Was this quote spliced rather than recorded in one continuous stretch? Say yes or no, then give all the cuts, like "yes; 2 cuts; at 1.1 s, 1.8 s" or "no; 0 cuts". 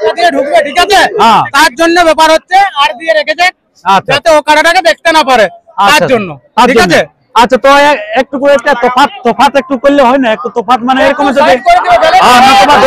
no; 0 cuts